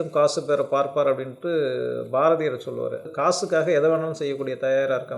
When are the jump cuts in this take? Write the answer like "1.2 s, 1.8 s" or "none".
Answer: 3.0 s